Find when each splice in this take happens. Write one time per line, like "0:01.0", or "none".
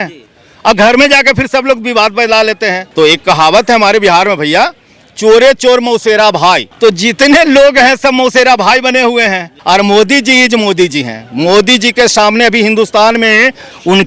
0:02.8
0:06.7
0:09.5